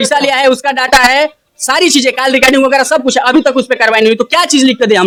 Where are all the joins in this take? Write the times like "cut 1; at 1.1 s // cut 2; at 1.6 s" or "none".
none

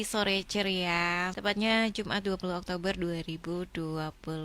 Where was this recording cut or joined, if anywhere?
cut 1; at 1.3 s

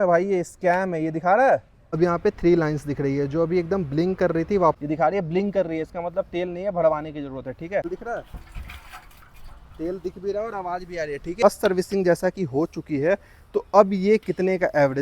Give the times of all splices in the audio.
cut 1; at 1.8 s // cut 2; at 4.8 s // cut 3; at 7.8 s // cut 4; at 11.4 s

